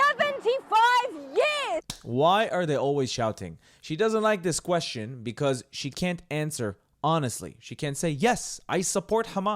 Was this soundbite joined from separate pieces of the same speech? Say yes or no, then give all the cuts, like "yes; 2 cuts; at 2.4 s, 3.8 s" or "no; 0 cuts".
yes; 1 cut; at 1.9 s